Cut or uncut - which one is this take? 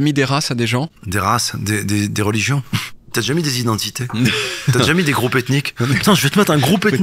cut